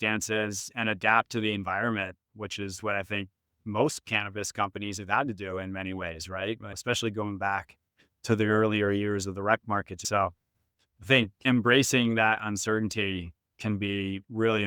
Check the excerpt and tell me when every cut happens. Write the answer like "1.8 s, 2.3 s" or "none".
6.7 s, 10.0 s, 11.4 s